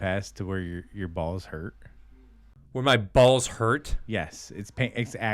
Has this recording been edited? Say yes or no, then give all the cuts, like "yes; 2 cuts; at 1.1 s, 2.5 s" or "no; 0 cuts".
yes; 1 cut; at 2.8 s